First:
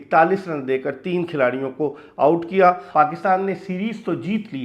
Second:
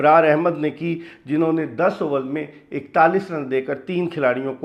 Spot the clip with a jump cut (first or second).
first